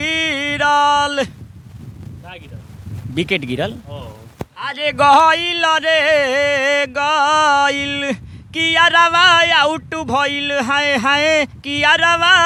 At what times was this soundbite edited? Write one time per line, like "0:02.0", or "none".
none

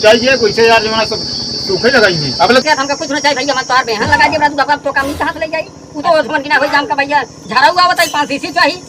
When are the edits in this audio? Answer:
none

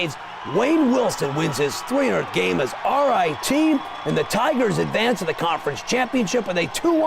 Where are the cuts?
0:01.8

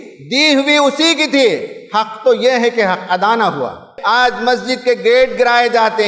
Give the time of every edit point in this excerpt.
0:03.9

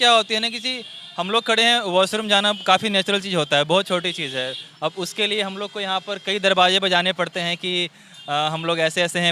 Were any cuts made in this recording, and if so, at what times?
none

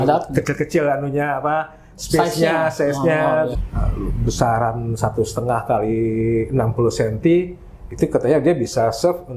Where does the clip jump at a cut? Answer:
0:03.6

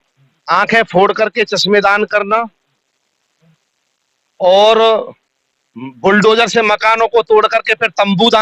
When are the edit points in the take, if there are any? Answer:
none

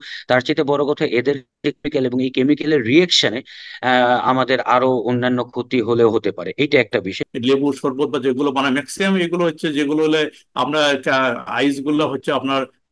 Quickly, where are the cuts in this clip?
0:07.2

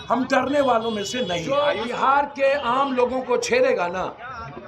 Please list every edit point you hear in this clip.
0:01.4

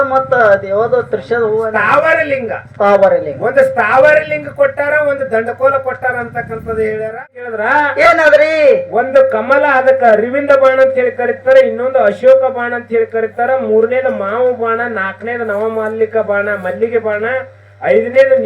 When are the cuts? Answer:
0:07.3

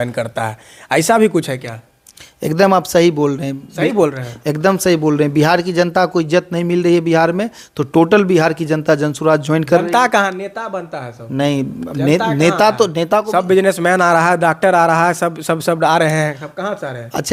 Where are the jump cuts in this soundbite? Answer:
none

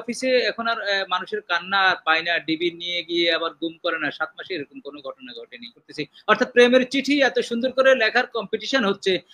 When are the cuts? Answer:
0:05.9

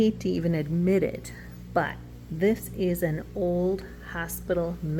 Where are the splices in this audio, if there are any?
none

